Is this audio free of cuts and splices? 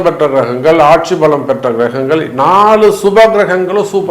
yes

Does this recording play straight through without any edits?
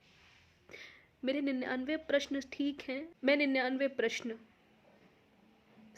no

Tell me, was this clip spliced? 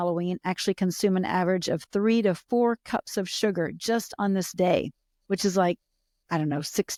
no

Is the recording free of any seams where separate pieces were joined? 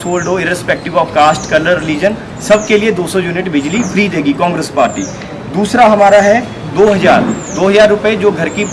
yes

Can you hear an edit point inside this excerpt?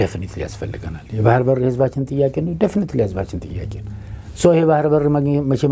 no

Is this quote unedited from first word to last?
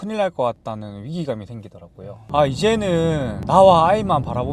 yes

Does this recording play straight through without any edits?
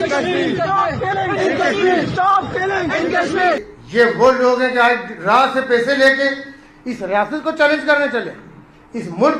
no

